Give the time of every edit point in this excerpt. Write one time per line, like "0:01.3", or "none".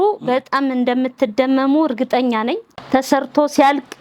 0:03.0